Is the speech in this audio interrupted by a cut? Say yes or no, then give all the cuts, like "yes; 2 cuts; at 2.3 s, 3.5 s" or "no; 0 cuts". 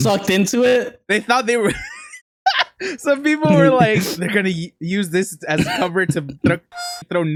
no; 0 cuts